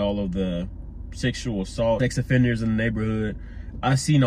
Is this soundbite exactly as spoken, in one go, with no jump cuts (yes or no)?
no